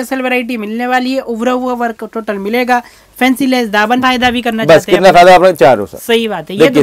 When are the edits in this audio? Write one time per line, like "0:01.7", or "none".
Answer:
0:04.0